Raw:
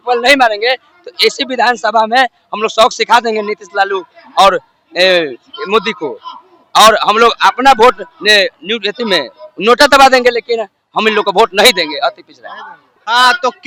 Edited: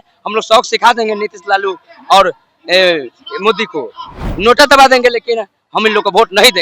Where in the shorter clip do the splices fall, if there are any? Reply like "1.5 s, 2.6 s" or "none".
4.2 s